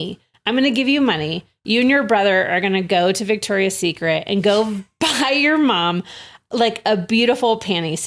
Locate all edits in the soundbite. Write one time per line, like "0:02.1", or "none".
none